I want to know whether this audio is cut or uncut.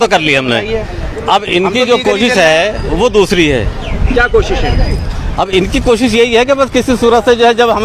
uncut